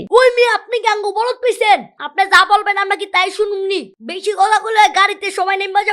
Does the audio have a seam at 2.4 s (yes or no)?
no